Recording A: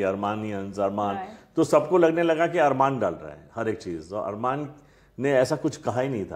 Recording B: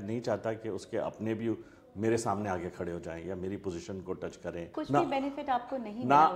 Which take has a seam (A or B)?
B